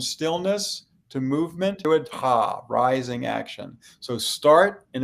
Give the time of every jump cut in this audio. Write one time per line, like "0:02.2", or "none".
0:01.8